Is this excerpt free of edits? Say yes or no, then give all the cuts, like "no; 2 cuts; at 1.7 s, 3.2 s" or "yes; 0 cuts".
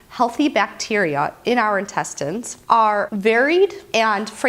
no; 1 cut; at 2.9 s